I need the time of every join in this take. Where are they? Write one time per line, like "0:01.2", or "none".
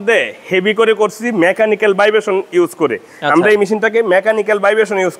none